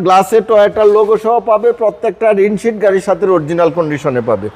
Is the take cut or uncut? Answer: uncut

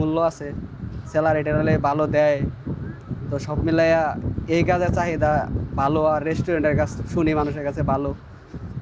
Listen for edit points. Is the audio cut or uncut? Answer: uncut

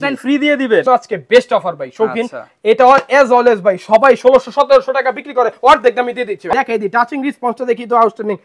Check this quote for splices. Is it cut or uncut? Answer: cut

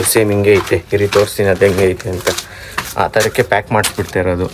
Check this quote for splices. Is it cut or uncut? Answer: uncut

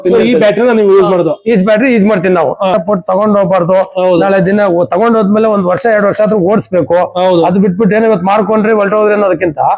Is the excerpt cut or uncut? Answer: cut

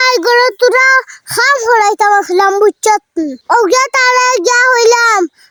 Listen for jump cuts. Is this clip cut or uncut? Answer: uncut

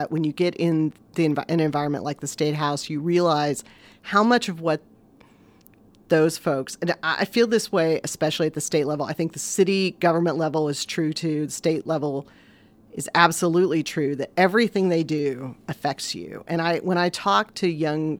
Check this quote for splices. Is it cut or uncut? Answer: uncut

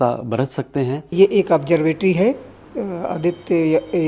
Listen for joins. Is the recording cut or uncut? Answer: cut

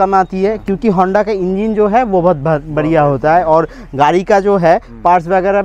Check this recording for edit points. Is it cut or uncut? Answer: uncut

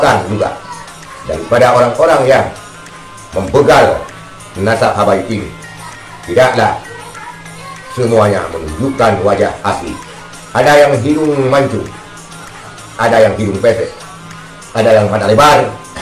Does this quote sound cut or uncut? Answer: uncut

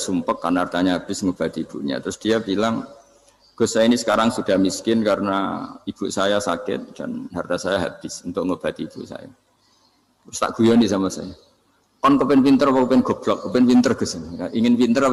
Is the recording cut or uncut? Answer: uncut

